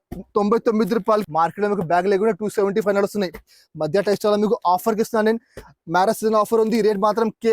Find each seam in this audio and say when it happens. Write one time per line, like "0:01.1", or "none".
0:01.2